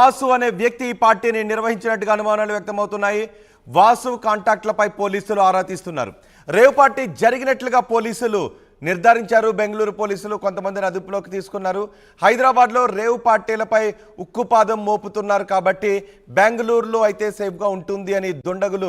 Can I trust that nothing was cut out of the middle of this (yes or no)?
yes